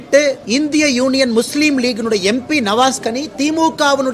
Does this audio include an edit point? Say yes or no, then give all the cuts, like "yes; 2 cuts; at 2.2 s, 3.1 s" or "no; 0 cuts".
no; 0 cuts